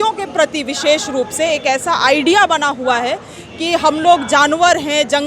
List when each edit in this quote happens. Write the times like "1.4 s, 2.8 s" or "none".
none